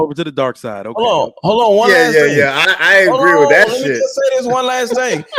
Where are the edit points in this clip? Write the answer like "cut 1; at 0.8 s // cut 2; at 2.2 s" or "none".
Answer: none